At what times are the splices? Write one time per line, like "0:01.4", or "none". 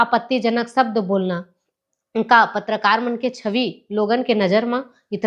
none